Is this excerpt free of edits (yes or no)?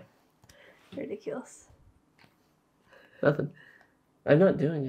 yes